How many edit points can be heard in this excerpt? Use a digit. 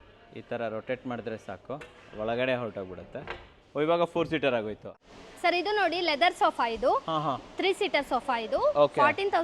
1